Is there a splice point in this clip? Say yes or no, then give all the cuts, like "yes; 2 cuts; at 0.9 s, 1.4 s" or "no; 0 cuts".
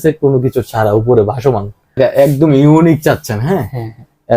yes; 1 cut; at 2.0 s